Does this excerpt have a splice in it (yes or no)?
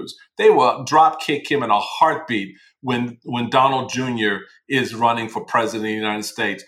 no